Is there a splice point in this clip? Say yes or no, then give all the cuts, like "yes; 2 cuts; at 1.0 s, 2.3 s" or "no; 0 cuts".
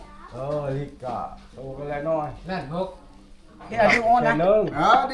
yes; 1 cut; at 3.7 s